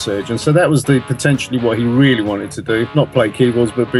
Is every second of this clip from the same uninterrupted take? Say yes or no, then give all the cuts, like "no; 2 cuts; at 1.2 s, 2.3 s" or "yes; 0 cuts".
no; 1 cut; at 2.9 s